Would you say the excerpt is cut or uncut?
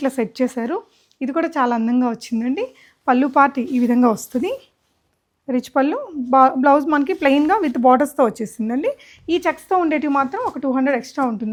uncut